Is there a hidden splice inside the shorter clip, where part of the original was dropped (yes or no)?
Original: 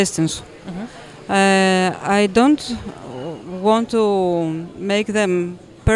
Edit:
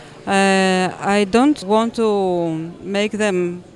yes